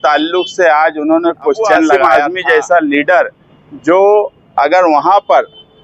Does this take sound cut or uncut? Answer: cut